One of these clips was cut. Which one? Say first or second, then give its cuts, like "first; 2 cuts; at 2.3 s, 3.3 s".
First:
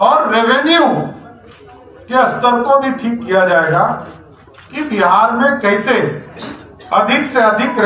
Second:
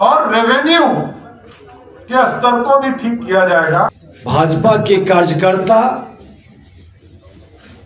second; 1 cut; at 4.1 s